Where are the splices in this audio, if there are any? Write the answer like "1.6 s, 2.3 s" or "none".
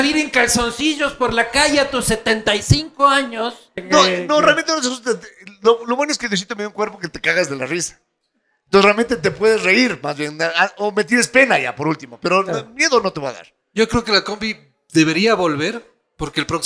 3.7 s, 13.6 s